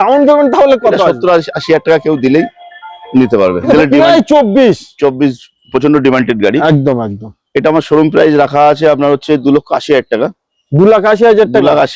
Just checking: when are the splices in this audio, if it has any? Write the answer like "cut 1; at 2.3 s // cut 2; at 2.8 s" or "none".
cut 1; at 3.7 s